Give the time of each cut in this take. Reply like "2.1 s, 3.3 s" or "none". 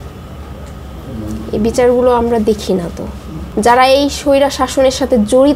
3.4 s